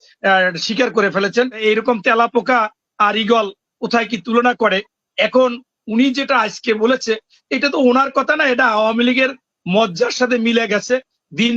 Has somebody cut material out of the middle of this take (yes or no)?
yes